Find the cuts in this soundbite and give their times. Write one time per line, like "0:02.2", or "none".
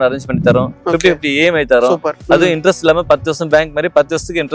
none